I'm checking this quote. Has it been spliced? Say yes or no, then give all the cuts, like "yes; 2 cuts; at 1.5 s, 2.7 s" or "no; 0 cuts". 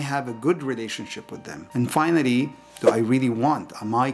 no; 0 cuts